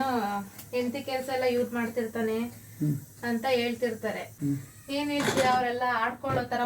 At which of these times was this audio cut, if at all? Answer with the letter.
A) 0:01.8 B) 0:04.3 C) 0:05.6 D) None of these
B